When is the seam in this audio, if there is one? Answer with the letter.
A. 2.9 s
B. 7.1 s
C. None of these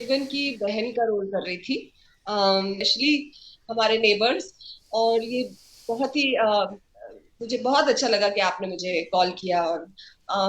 A